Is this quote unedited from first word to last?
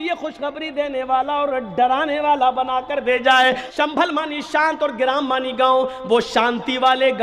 no; 1 cut; at 3.7 s

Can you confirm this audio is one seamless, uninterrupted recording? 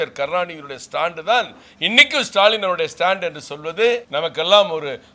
no; 1 cut; at 4.1 s

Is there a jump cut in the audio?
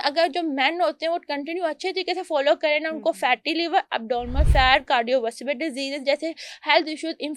no; 0 cuts

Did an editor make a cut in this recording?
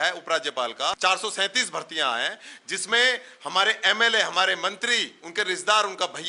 yes; 1 cut; at 1.0 s

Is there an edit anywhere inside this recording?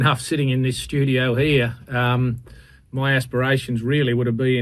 no; 0 cuts

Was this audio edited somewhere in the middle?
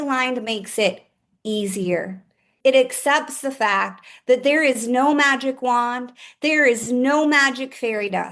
yes; 1 cut; at 2.5 s

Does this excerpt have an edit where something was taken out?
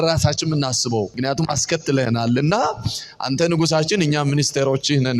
yes; 1 cut; at 1.1 s

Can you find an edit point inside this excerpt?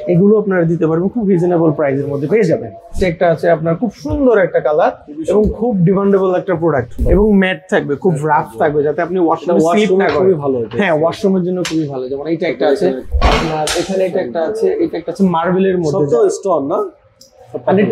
yes; 3 cuts; at 3.0 s, 7.0 s, 13.1 s

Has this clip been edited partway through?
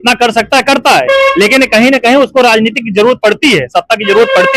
no; 0 cuts

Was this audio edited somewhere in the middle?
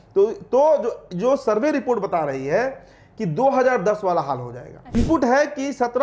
yes; 1 cut; at 5.0 s

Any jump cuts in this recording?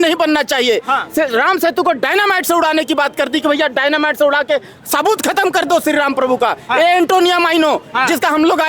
no; 0 cuts

